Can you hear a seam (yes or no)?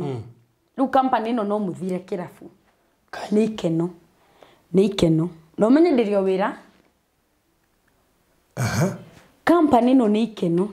no